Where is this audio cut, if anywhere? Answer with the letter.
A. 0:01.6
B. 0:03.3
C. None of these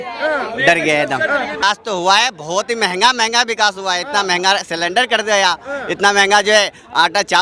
A